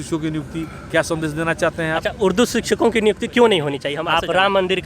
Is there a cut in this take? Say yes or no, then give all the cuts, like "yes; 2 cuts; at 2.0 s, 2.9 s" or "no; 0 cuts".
yes; 1 cut; at 3.9 s